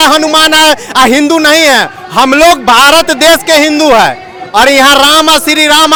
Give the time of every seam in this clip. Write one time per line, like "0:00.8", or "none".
none